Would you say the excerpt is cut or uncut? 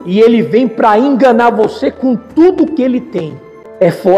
cut